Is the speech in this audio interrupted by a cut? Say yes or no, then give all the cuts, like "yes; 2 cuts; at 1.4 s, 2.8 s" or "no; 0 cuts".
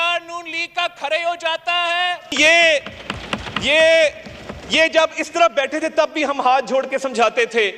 yes; 1 cut; at 2.3 s